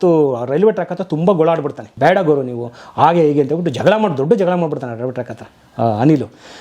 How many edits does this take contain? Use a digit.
1